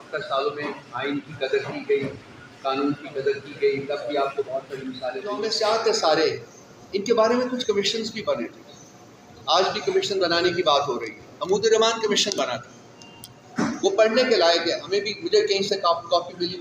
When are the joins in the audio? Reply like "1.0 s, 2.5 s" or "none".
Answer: 5.5 s